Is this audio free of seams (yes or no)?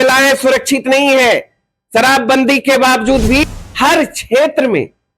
no